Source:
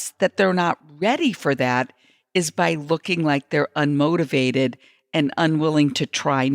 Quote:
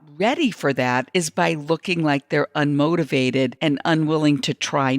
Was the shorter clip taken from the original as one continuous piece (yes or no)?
no